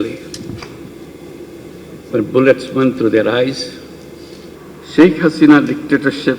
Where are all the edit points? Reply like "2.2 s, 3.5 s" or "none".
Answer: 4.5 s